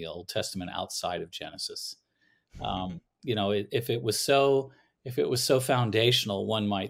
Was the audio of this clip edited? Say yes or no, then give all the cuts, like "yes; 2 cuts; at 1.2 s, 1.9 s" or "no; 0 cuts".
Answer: no; 0 cuts